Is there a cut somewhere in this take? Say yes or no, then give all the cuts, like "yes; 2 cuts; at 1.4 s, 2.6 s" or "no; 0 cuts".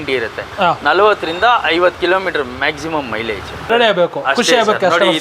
yes; 1 cut; at 3.7 s